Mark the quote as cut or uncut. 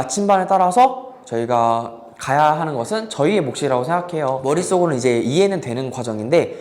cut